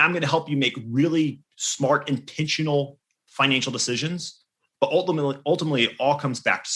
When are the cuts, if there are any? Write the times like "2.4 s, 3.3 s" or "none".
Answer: none